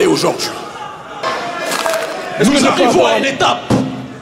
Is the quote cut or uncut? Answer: cut